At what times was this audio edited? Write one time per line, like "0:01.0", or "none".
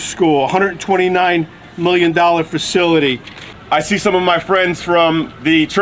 0:03.5